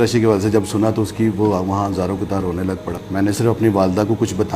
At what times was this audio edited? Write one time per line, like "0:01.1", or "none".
0:03.0